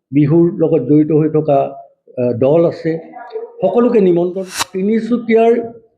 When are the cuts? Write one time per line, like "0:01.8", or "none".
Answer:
0:04.6

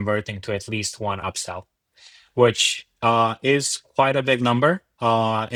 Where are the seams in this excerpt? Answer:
none

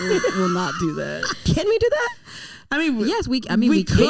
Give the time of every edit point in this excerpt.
0:01.4

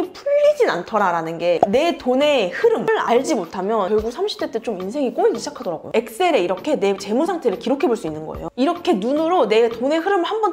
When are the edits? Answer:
0:01.6
0:02.9
0:05.8

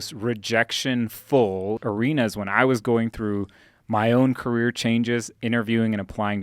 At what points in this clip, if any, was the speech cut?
0:01.8

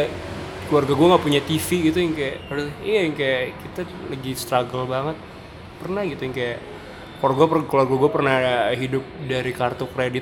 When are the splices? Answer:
none

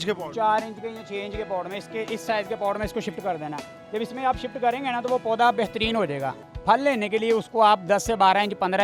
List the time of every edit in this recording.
none

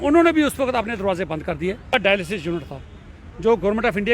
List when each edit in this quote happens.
0:01.9

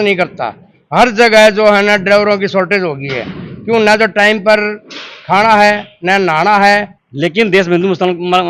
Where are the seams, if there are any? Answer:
0:06.9

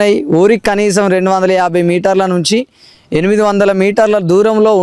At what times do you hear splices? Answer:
none

